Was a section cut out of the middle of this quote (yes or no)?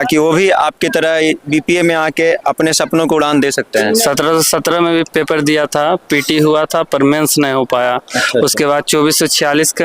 yes